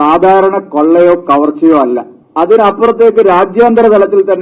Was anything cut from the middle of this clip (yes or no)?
yes